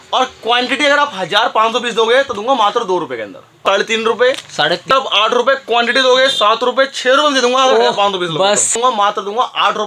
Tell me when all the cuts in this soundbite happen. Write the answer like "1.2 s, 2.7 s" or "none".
3.6 s, 4.9 s, 8.7 s